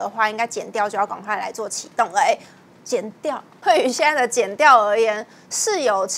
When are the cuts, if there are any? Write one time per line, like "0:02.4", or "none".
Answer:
0:03.6